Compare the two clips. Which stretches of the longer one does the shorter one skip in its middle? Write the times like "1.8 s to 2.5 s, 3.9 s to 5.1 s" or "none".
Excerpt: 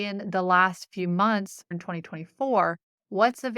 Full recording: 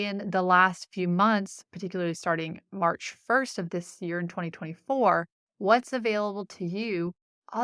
1.7 s to 4.2 s